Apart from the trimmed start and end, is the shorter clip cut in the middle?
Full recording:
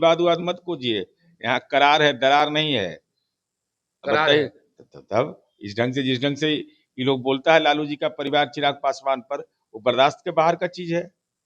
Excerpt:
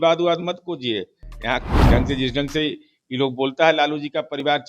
yes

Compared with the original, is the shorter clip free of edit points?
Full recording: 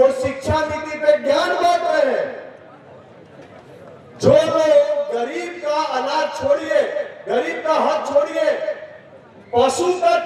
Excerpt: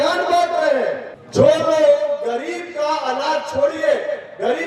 no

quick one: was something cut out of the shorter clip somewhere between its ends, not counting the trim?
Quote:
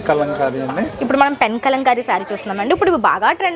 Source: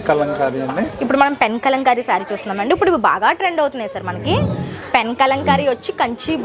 no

